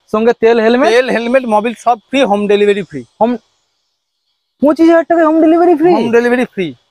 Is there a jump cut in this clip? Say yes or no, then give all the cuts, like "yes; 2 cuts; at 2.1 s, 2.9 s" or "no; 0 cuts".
no; 0 cuts